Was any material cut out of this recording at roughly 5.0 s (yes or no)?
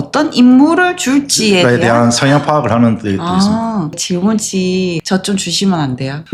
yes